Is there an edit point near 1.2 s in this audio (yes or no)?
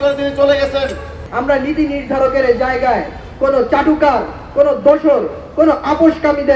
yes